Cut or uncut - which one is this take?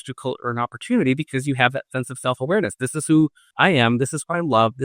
cut